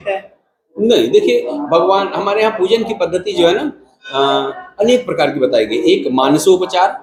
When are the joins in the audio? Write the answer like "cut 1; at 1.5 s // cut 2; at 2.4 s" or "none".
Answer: none